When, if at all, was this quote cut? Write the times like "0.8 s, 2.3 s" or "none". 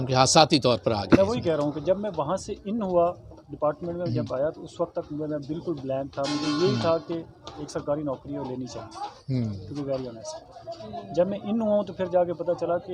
none